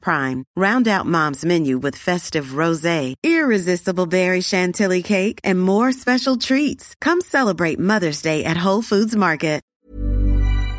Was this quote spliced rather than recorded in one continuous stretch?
yes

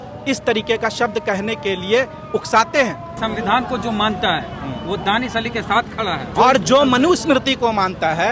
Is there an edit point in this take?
yes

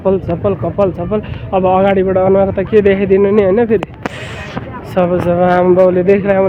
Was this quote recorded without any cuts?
yes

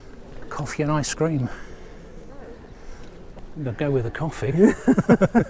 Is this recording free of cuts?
yes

